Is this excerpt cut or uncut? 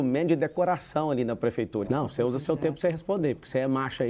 cut